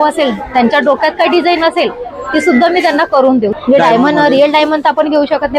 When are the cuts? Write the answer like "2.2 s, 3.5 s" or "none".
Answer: 3.6 s